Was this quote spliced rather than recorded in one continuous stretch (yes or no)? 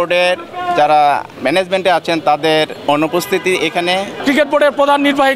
yes